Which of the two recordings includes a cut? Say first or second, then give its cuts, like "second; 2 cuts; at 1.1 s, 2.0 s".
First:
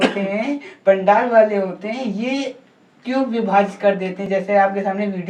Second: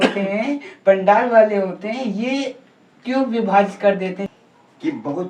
second; 1 cut; at 4.2 s